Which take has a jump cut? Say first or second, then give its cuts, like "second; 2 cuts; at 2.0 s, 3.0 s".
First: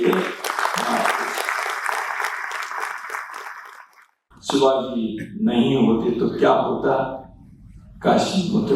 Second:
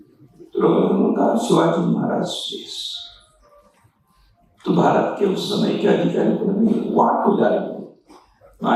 first; 1 cut; at 4.3 s